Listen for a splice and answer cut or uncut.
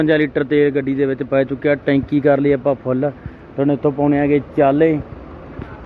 uncut